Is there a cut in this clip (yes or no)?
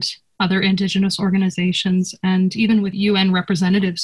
yes